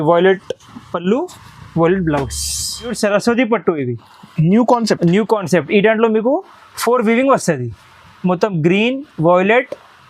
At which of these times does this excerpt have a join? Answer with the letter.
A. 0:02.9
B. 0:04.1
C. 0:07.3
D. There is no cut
A